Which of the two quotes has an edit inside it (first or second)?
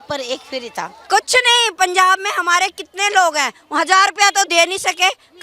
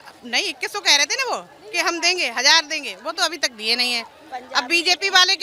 first